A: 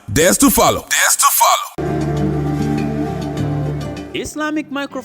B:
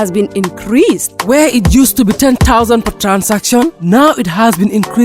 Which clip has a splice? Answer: A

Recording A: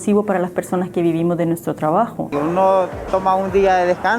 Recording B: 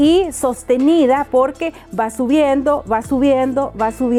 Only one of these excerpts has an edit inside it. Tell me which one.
A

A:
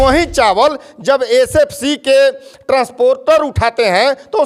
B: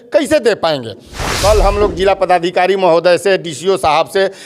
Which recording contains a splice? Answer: B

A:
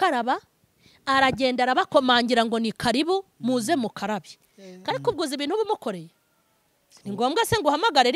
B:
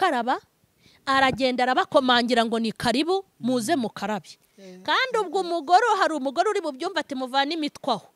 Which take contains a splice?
A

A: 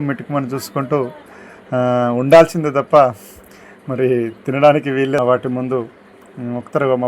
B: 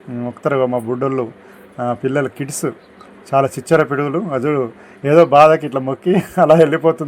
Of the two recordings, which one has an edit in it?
A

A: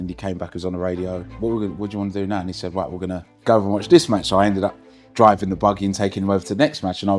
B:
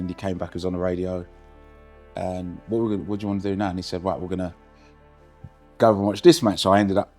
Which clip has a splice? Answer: A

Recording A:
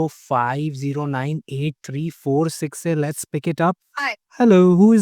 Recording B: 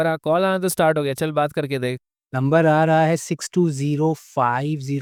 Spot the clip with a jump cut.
A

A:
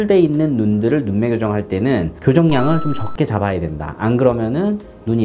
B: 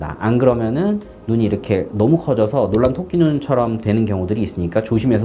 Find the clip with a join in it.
A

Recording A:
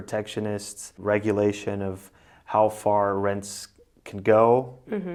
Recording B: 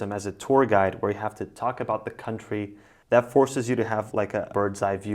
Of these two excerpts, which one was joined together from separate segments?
B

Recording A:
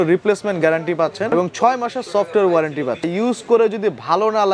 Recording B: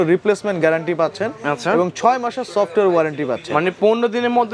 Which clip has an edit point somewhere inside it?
A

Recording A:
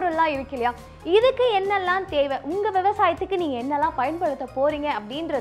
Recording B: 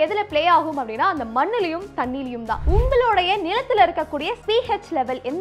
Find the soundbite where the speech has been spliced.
B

